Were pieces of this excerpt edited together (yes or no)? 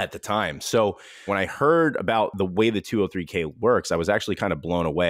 yes